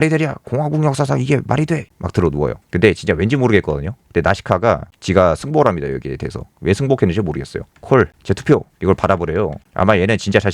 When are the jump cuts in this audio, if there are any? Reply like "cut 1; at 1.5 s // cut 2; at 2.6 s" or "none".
cut 1; at 1.9 s // cut 2; at 4.9 s // cut 3; at 7.7 s